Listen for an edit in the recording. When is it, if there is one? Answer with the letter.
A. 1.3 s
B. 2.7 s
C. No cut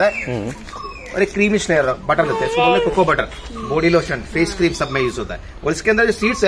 C